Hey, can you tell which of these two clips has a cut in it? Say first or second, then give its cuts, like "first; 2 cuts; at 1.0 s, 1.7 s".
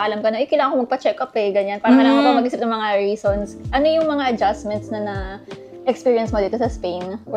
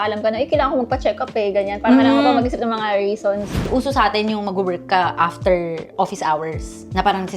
second; 1 cut; at 3.7 s